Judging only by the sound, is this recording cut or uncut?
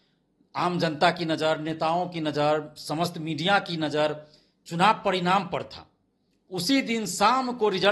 uncut